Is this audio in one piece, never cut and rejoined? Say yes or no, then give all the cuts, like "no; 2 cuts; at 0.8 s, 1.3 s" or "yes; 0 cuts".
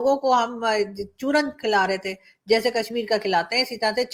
yes; 0 cuts